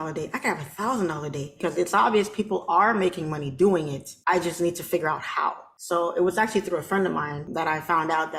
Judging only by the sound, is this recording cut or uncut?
cut